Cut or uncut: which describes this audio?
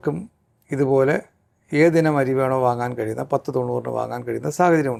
uncut